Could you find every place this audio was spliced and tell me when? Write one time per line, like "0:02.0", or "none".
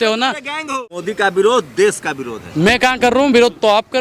0:01.0